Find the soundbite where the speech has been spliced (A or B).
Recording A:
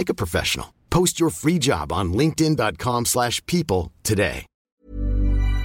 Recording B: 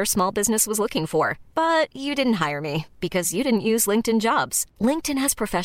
A